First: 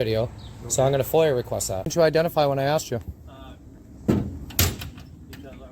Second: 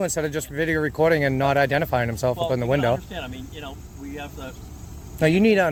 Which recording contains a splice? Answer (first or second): first